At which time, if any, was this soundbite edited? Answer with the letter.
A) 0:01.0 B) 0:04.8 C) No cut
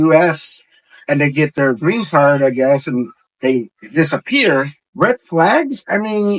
B